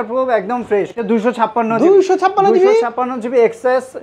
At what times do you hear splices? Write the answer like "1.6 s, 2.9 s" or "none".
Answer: 1.0 s